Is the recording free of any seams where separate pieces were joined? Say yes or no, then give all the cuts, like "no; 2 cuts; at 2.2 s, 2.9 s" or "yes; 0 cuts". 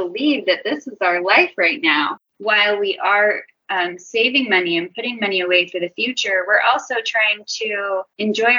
no; 1 cut; at 2.2 s